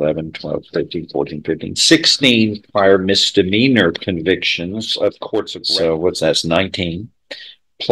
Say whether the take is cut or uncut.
cut